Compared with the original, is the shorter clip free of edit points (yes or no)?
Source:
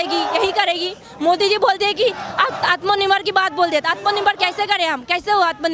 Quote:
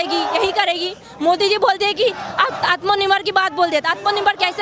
yes